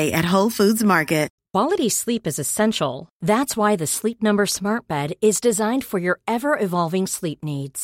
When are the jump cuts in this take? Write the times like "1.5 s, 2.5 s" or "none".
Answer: 1.4 s